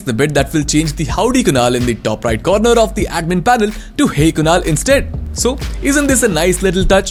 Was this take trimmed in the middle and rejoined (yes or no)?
no